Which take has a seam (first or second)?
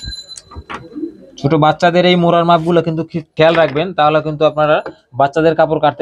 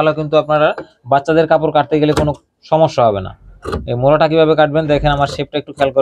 first